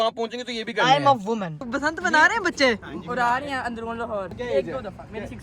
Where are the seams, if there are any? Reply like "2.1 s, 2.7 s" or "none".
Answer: 1.6 s, 4.3 s